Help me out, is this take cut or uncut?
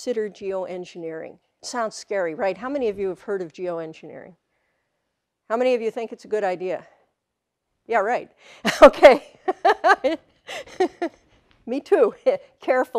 uncut